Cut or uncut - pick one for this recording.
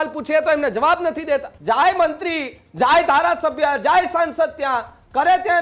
cut